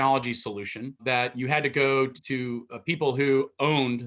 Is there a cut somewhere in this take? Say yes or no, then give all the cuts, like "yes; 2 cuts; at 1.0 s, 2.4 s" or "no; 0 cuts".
yes; 2 cuts; at 1.0 s, 2.2 s